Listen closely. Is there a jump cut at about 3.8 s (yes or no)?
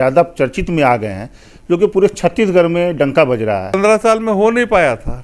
yes